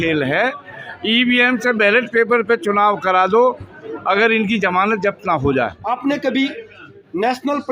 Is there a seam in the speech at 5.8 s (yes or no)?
yes